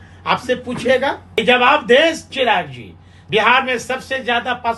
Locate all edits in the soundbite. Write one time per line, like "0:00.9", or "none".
0:01.4
0:03.1